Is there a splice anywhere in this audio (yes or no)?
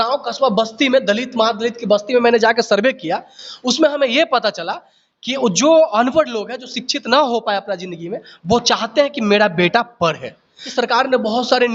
yes